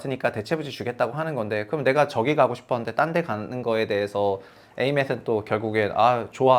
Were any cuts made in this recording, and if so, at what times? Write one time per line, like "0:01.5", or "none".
none